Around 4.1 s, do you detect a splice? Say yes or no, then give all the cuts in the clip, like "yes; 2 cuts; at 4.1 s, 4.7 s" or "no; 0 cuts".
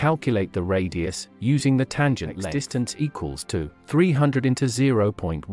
no; 1 cut; at 2.5 s